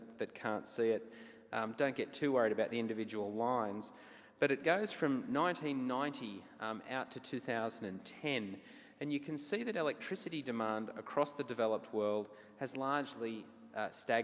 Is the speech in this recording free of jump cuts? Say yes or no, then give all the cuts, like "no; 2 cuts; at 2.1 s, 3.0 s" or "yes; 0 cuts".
yes; 0 cuts